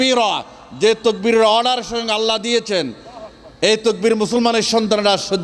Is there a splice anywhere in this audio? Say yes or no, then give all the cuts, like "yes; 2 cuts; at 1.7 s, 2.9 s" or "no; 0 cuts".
no; 0 cuts